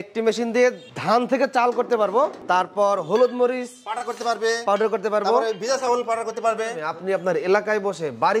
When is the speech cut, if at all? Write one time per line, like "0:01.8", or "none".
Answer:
0:00.9
0:02.4
0:06.8